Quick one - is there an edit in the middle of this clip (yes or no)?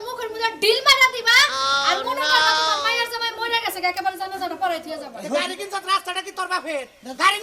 yes